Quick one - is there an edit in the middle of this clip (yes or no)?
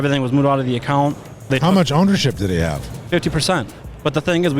yes